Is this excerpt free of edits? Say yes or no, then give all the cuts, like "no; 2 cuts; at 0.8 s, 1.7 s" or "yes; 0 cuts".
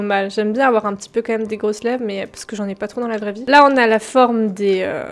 yes; 0 cuts